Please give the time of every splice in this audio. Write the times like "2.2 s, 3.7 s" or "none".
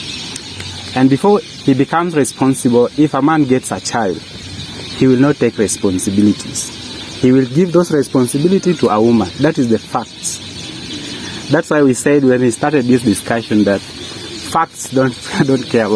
none